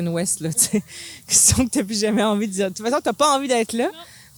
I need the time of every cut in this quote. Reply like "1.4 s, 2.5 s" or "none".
none